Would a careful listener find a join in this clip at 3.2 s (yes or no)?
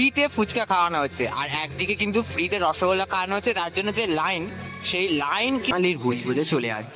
no